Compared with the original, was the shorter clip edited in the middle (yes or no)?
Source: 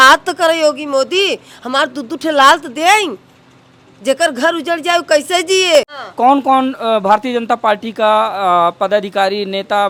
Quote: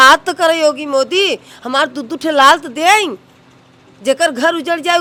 no